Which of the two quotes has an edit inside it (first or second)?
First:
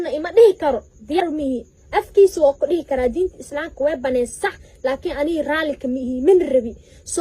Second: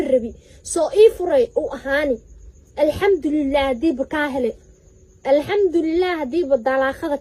first